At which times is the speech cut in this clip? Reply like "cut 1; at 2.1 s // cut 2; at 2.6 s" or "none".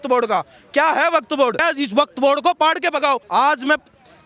cut 1; at 1.6 s // cut 2; at 3.2 s